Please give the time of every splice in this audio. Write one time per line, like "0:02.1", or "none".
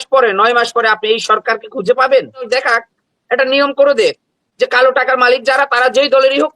0:02.5